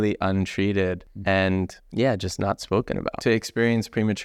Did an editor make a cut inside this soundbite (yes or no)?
yes